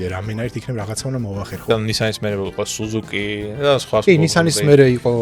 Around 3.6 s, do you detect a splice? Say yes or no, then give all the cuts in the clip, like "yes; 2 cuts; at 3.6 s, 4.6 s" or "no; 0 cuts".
no; 1 cut; at 1.6 s